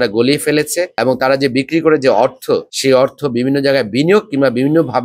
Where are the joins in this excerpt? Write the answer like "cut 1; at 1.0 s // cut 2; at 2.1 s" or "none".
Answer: none